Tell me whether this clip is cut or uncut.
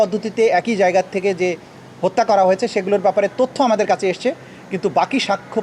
uncut